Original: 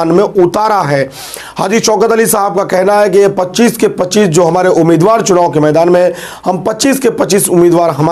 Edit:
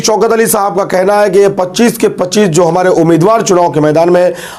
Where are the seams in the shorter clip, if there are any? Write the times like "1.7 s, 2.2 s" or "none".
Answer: none

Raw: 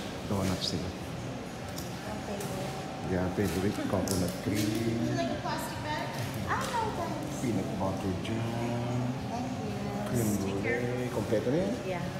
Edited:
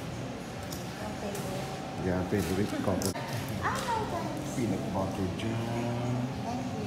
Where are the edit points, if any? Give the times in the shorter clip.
3.1 s

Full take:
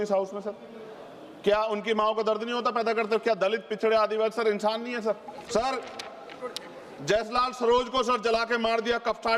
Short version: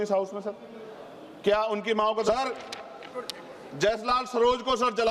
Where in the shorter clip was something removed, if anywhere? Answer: 2.2 s

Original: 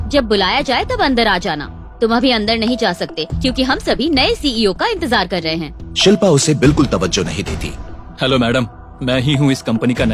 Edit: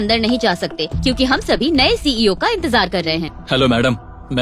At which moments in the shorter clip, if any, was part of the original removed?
3.3 s

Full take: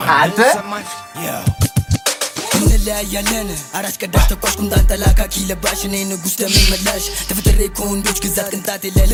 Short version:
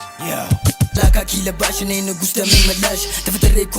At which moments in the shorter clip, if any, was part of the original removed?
0.9 s

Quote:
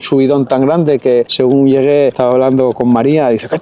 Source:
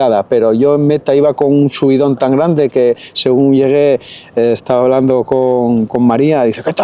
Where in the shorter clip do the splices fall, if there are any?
1.3 s, 2.6 s

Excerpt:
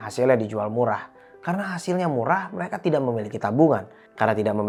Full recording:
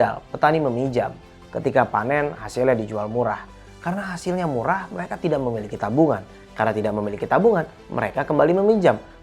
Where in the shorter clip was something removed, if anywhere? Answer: none

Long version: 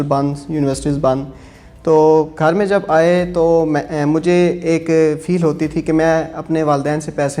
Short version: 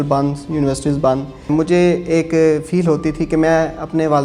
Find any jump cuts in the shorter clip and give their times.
1.4 s

